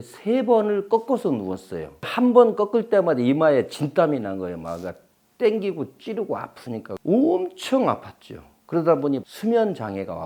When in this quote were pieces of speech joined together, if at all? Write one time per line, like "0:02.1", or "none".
0:02.1
0:06.9
0:09.3